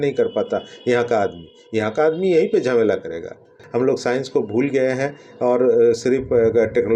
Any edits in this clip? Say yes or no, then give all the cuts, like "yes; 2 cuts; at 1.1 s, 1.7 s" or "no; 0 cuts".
yes; 1 cut; at 3.5 s